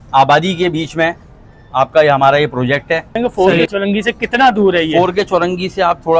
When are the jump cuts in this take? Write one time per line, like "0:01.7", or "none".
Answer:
0:03.1